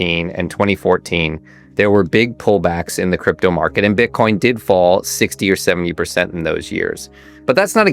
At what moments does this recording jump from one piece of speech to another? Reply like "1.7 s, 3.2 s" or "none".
none